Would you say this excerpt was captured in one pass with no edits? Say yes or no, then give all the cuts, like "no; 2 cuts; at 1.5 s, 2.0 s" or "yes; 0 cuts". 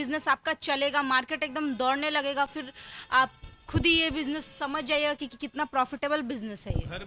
yes; 0 cuts